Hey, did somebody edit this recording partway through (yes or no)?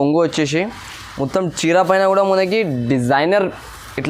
no